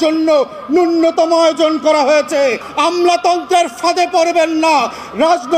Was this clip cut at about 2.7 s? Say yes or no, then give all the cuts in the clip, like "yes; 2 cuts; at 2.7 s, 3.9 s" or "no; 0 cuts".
yes; 1 cut; at 2.7 s